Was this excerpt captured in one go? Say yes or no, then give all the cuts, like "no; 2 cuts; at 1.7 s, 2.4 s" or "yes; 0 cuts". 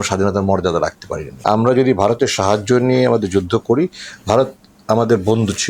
no; 1 cut; at 1.3 s